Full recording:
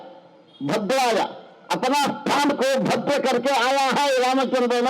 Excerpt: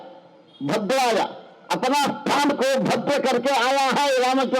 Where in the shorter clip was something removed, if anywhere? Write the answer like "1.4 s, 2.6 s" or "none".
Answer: none